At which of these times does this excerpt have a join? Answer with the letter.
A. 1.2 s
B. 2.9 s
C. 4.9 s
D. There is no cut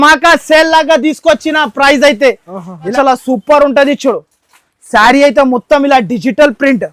B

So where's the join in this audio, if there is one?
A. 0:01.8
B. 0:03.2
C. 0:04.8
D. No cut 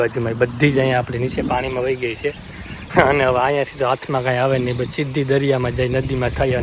D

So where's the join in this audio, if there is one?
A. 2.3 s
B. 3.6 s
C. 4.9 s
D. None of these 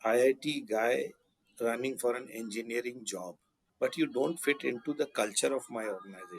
B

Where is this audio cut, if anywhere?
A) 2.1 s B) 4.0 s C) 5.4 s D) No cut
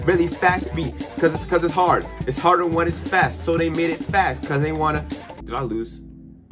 C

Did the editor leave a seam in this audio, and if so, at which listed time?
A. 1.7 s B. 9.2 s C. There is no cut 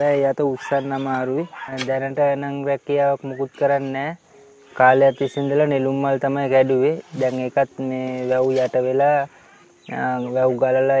A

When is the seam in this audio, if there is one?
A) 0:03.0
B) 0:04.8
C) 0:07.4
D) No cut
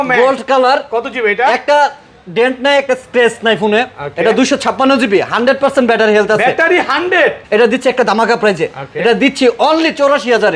C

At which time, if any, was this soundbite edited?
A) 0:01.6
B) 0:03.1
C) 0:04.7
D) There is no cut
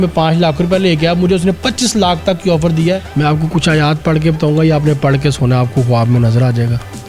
B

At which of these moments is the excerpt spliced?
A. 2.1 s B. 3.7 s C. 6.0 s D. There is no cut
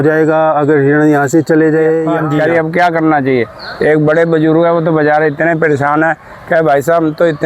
A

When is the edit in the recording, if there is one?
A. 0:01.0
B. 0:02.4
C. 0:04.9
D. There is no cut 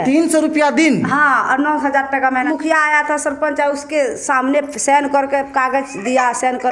B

